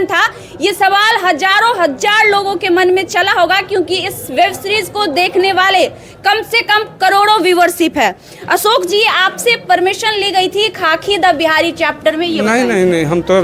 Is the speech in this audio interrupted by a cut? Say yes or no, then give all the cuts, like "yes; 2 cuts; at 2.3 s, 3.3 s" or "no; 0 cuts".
no; 0 cuts